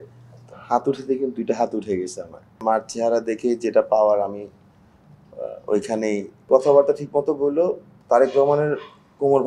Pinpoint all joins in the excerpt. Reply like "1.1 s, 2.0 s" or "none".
2.6 s, 6.5 s